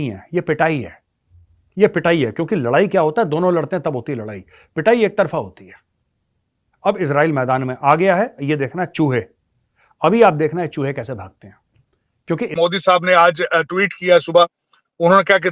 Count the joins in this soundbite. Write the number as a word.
one